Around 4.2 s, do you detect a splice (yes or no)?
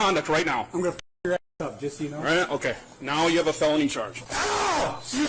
yes